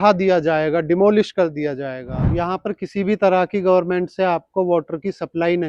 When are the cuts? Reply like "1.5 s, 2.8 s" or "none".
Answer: 2.3 s